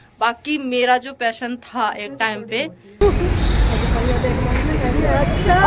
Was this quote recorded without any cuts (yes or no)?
no